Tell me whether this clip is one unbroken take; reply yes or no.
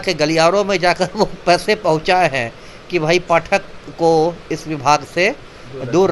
yes